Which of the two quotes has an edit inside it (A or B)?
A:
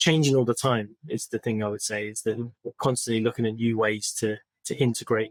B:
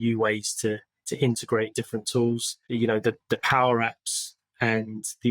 B